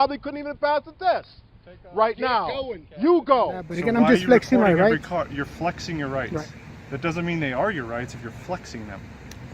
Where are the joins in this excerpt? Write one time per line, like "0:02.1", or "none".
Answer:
0:03.7